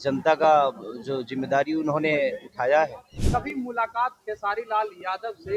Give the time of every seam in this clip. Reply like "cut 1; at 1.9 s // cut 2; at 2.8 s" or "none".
cut 1; at 3.2 s